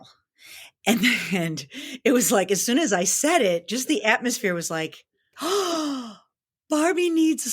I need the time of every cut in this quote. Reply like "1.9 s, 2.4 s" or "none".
5.3 s